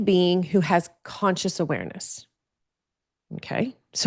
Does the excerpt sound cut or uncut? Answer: uncut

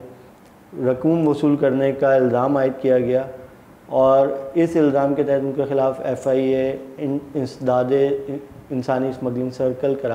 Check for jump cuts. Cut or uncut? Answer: uncut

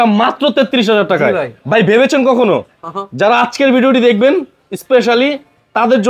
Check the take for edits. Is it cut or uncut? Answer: uncut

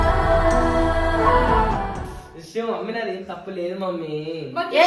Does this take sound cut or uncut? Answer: uncut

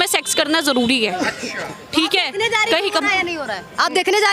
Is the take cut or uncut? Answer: cut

